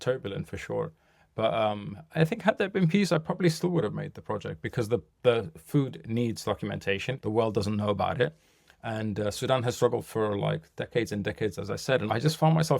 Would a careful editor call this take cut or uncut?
cut